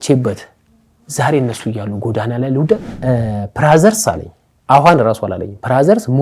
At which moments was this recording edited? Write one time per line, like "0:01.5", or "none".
0:02.9